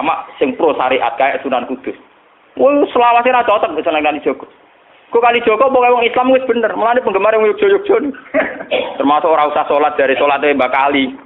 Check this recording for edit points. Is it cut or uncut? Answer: uncut